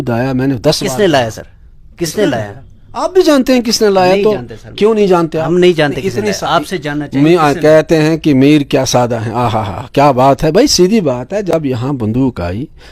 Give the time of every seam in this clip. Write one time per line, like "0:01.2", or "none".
none